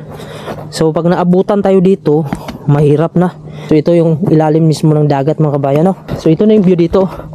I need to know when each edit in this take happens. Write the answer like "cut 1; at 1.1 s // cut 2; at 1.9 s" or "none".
cut 1; at 3.5 s // cut 2; at 6.1 s